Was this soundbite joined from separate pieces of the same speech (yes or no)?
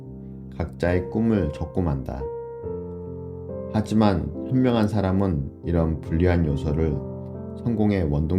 yes